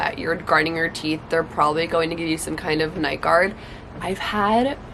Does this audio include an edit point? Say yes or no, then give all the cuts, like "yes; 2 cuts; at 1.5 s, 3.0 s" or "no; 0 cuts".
no; 0 cuts